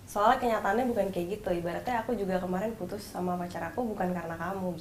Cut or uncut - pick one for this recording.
uncut